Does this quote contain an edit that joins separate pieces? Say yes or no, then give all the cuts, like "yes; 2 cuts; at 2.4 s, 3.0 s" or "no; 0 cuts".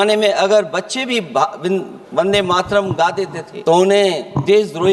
yes; 1 cut; at 3.5 s